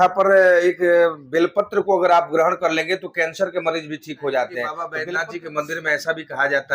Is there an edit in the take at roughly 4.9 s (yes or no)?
yes